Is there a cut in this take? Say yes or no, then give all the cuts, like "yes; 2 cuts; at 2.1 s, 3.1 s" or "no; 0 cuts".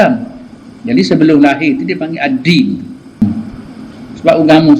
yes; 1 cut; at 3.2 s